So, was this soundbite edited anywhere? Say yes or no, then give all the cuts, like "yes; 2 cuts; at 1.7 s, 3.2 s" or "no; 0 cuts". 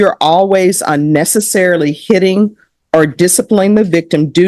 no; 0 cuts